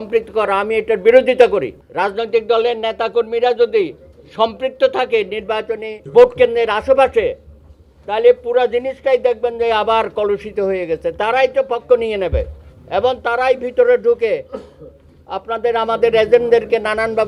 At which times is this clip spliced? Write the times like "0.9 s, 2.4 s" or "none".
1.8 s, 6.1 s